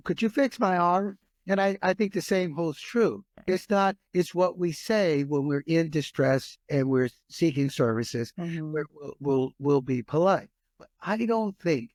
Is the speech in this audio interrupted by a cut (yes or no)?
no